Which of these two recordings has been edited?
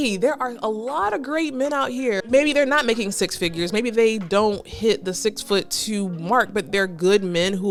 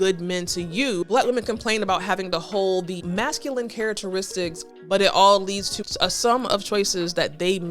second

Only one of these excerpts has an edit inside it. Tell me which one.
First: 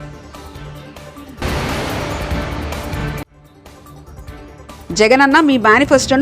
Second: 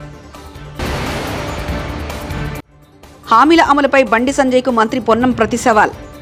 first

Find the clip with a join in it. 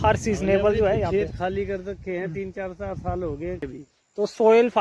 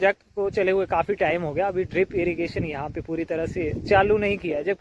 first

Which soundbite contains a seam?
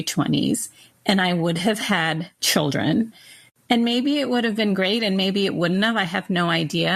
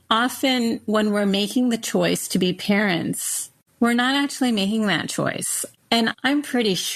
first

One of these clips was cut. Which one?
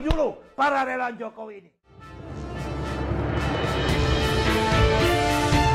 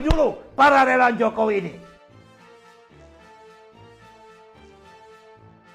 first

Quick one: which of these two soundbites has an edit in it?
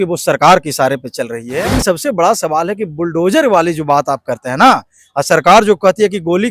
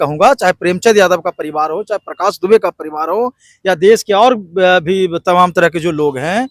first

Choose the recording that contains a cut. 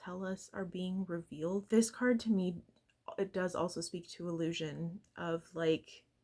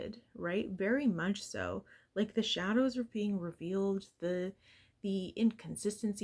first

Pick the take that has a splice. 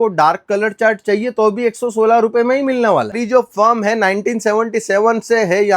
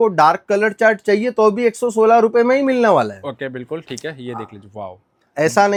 first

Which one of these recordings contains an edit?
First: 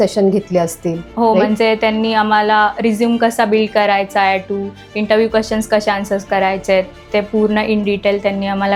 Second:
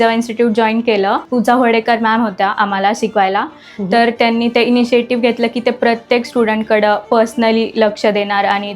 second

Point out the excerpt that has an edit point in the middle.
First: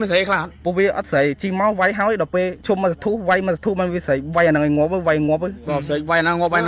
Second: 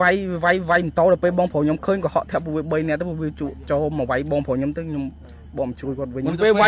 first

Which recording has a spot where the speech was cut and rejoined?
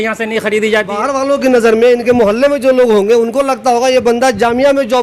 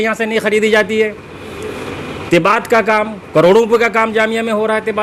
first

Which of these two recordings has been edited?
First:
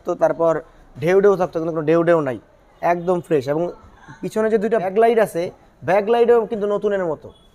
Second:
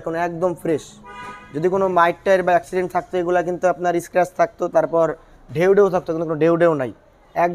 first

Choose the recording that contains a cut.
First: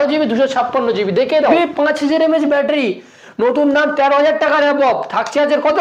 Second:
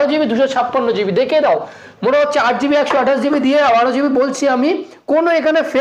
first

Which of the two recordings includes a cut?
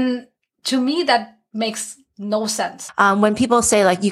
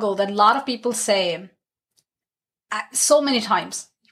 first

